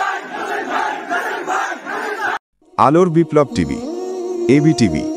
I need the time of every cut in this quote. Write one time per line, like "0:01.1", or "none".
0:02.4